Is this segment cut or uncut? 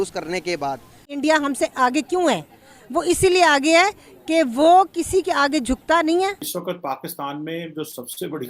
cut